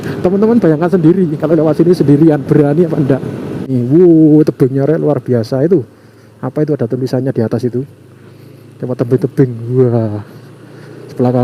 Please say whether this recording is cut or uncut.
cut